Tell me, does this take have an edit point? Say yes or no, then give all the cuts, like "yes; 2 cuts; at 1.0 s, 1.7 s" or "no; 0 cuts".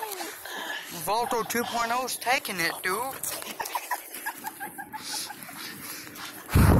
yes; 1 cut; at 2.5 s